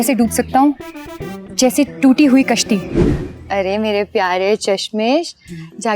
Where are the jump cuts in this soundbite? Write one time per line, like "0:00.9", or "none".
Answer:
0:03.3